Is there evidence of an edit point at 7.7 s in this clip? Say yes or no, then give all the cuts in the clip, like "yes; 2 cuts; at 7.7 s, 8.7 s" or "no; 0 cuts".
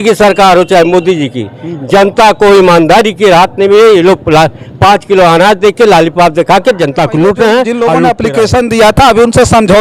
yes; 1 cut; at 7.7 s